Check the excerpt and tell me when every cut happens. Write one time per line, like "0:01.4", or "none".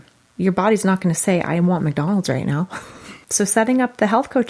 0:03.2